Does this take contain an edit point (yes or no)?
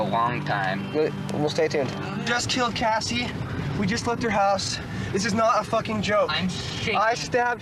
no